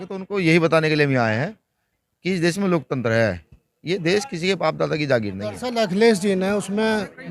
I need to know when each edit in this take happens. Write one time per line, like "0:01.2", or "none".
0:05.7